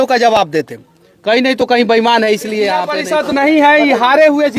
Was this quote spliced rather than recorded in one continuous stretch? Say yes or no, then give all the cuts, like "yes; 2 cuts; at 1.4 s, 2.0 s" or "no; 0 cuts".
yes; 1 cut; at 3.0 s